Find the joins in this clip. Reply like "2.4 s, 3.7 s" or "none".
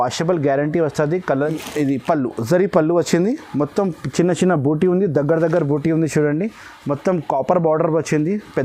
1.4 s